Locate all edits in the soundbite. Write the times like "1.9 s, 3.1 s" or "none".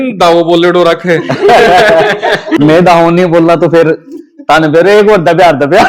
2.5 s